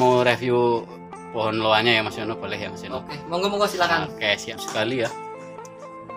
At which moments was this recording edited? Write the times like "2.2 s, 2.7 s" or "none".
4.4 s